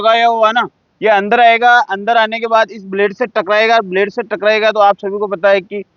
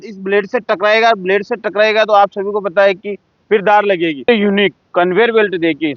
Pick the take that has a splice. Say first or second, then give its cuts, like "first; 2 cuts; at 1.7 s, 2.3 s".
second; 1 cut; at 4.3 s